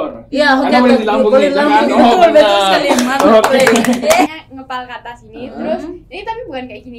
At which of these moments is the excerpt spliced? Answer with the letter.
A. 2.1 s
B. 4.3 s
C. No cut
B